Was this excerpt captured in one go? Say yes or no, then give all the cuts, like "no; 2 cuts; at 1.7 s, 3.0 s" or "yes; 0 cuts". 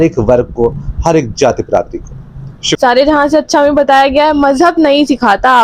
no; 1 cut; at 2.8 s